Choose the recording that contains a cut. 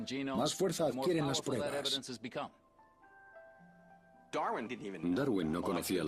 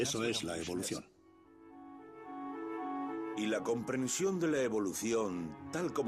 second; 1 cut; at 1.6 s

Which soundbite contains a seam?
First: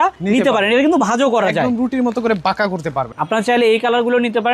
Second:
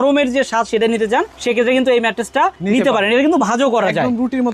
first; 1 cut; at 3.1 s

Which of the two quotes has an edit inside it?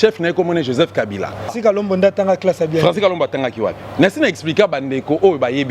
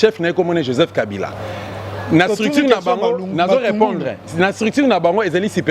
first; 1 cut; at 1.5 s

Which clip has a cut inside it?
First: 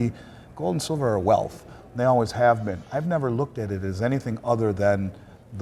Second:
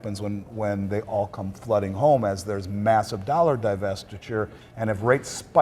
second; 1 cut; at 4.6 s

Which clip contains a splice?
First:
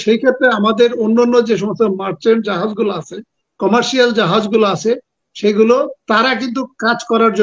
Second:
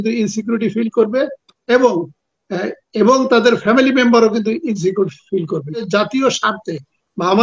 second; 1 cut; at 5.9 s

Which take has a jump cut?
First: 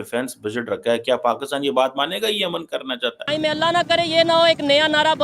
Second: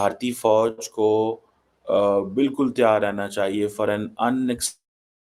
first; 1 cut; at 3.2 s

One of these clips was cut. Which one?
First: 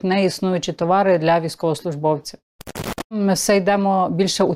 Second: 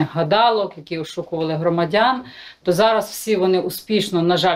first; 1 cut; at 3.1 s

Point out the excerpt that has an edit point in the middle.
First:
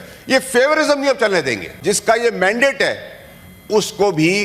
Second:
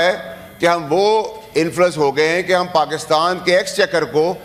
first; 1 cut; at 1.6 s

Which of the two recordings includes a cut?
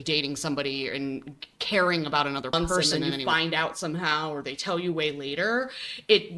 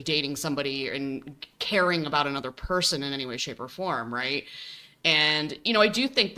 first; 1 cut; at 2.7 s

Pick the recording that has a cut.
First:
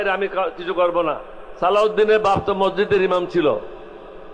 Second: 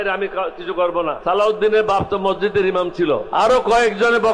second; 2 cuts; at 1.2 s, 3.3 s

